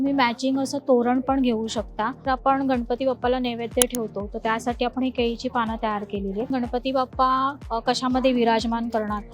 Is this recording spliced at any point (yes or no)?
yes